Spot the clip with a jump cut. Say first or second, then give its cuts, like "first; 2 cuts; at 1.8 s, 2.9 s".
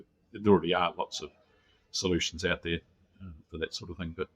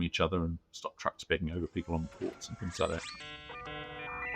second; 1 cut; at 3.4 s